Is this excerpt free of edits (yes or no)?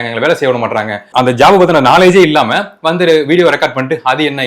no